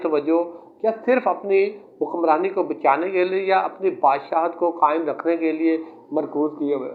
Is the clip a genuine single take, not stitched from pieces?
yes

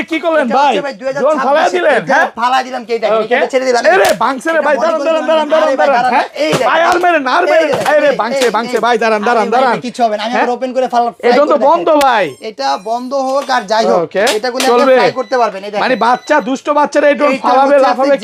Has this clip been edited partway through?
no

